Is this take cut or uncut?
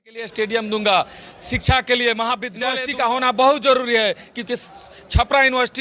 cut